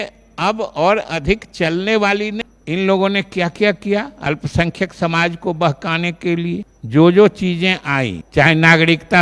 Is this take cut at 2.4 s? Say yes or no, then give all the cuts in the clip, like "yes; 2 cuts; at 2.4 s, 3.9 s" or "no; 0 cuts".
yes; 3 cuts; at 2.4 s, 6.7 s, 8.2 s